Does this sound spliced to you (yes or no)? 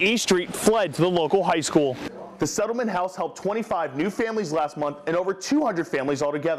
yes